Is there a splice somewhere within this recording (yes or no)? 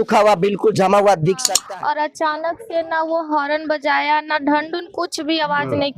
yes